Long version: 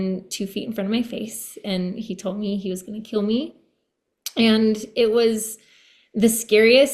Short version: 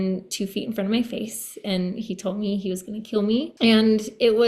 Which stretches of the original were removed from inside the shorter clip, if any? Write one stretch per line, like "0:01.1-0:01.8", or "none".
0:03.5-0:04.3